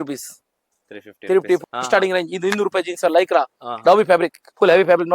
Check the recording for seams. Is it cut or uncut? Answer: cut